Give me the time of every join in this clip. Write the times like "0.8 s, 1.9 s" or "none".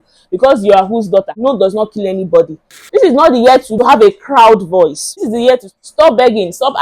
1.3 s, 2.7 s, 3.7 s, 5.1 s